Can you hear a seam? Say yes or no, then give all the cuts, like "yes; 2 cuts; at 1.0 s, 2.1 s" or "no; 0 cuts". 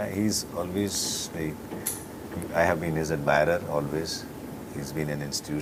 no; 0 cuts